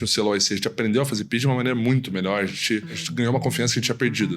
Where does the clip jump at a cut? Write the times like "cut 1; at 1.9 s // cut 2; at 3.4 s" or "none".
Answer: cut 1; at 3.0 s